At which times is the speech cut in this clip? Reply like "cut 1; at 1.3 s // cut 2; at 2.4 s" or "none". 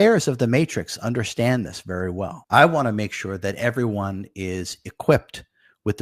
cut 1; at 2.4 s